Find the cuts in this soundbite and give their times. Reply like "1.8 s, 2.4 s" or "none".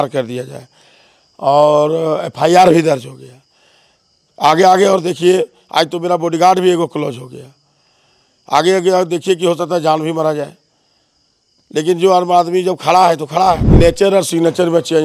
13.7 s